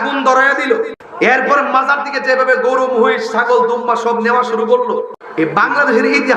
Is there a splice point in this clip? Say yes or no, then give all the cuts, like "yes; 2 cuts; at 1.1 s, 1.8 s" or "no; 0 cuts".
yes; 2 cuts; at 1.0 s, 5.2 s